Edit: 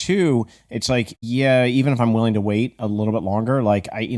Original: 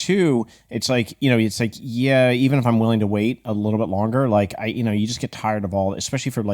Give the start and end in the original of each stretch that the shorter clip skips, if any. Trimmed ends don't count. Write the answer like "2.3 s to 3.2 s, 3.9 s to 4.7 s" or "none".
1.1 s to 1.8 s

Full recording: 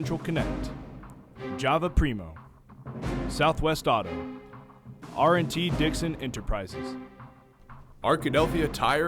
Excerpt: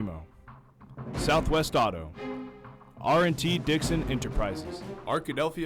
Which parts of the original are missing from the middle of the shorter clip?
6.7 s to 7.6 s

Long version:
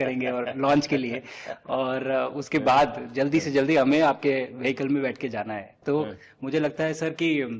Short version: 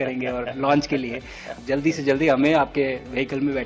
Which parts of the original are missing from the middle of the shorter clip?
1.5 s to 3.0 s

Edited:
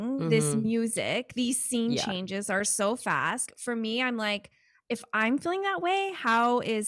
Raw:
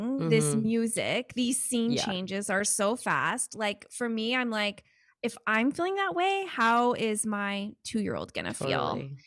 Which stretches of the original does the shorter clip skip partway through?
3.5 s to 3.8 s

